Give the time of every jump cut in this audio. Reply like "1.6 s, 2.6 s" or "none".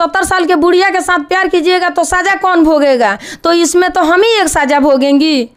none